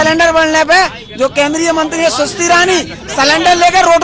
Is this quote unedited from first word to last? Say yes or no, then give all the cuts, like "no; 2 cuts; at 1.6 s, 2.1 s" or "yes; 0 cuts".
yes; 0 cuts